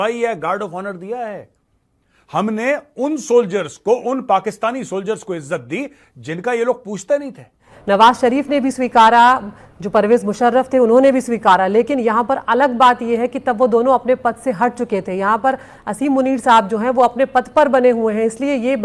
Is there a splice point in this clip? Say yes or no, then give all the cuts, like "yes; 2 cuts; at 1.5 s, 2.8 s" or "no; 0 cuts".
yes; 1 cut; at 7.7 s